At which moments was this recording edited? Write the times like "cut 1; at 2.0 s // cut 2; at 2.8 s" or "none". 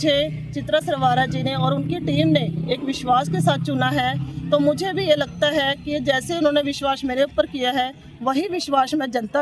none